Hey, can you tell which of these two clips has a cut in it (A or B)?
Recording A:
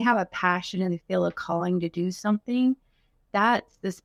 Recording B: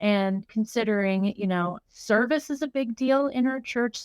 B